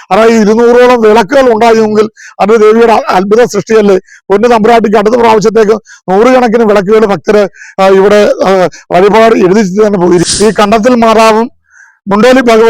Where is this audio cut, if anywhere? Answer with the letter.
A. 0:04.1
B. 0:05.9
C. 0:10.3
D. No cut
C